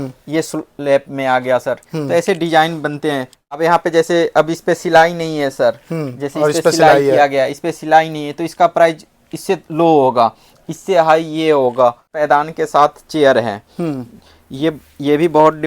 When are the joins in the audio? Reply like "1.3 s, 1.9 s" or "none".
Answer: 3.6 s, 12.1 s